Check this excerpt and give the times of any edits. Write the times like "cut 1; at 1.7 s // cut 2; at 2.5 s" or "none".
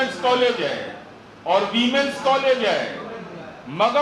none